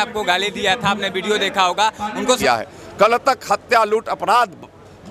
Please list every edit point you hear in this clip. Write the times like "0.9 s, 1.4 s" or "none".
2.4 s